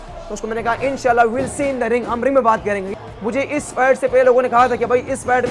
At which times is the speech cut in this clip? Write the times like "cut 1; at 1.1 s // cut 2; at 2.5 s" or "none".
cut 1; at 2.9 s